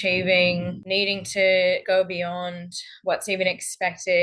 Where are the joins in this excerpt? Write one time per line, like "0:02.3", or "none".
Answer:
none